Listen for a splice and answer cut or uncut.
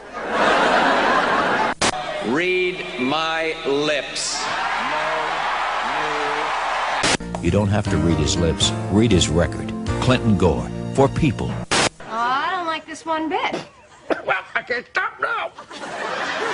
uncut